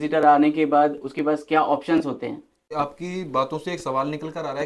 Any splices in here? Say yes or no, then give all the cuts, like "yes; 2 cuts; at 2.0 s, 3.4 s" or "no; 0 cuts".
yes; 1 cut; at 2.6 s